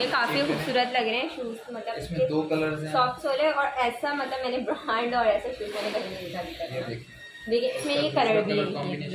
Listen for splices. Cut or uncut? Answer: uncut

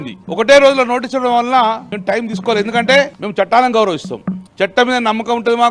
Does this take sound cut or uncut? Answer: uncut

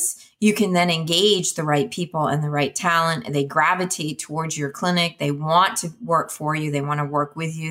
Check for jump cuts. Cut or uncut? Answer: uncut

